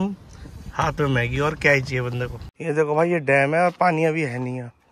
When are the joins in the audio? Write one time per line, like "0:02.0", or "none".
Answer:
0:02.4